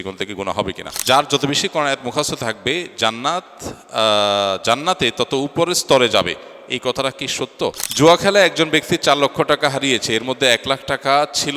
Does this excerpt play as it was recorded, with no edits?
no; 2 cuts; at 1.0 s, 7.8 s

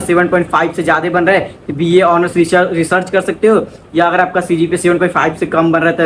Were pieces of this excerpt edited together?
no; 0 cuts

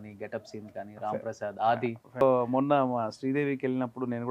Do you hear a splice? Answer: yes; 1 cut; at 2.2 s

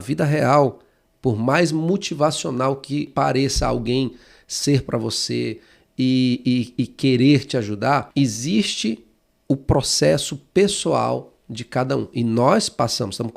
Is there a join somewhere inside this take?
yes; 2 cuts; at 3.1 s, 8.1 s

